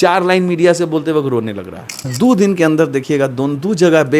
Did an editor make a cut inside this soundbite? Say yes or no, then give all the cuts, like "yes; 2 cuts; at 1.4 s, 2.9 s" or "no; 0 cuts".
yes; 1 cut; at 2.1 s